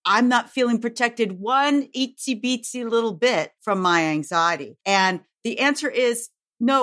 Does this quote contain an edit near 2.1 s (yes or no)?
no